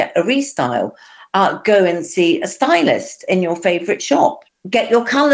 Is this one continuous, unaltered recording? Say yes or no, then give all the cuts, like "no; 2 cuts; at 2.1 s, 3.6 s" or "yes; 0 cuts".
no; 1 cut; at 4.4 s